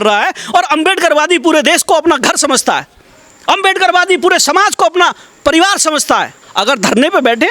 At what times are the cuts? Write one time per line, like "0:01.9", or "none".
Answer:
0:06.4